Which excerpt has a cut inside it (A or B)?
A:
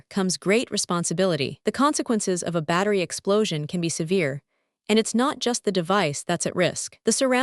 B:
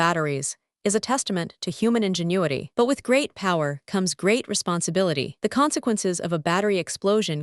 B